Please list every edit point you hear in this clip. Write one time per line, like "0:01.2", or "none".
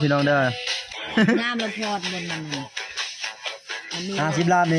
0:01.0